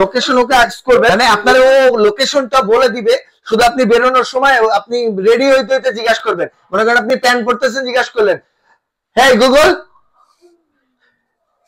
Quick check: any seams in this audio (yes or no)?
yes